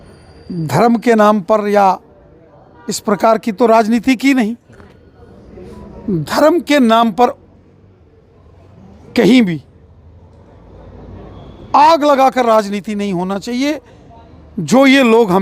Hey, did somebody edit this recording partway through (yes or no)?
yes